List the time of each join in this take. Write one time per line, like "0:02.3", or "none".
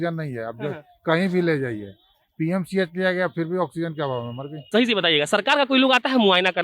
0:04.7